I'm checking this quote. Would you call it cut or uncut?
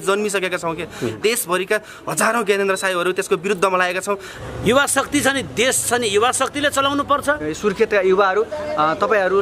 cut